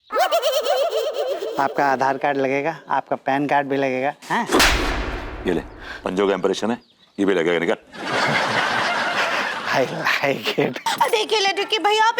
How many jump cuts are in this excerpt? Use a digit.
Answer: 2